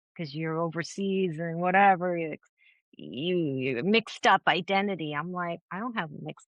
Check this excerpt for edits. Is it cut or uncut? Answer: uncut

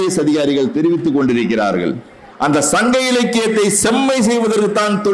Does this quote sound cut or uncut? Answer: cut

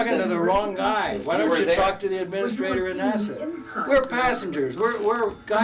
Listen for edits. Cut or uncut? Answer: uncut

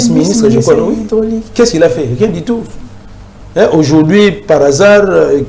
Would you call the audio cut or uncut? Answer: uncut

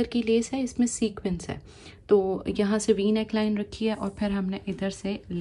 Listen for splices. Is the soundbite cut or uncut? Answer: uncut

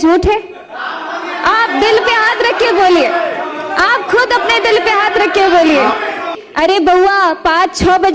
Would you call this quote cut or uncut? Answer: cut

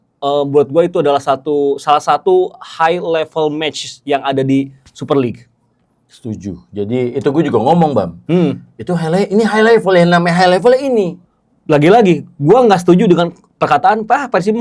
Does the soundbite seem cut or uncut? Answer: cut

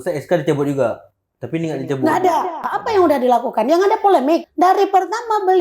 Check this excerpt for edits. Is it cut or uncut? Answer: cut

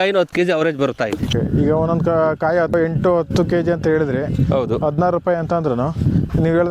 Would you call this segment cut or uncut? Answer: cut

